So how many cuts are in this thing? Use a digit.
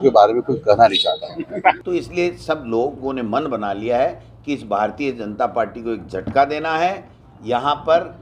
1